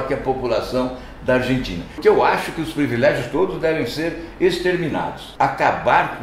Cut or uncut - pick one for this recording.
cut